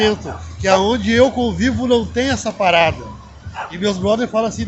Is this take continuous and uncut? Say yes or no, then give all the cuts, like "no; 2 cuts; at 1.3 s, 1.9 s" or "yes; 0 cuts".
yes; 0 cuts